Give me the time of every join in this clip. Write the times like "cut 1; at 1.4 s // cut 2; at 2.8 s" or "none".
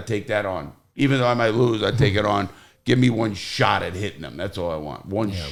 none